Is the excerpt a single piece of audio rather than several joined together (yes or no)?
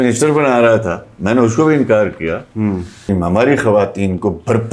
no